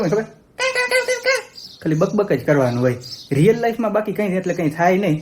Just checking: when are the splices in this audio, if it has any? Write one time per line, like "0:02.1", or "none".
none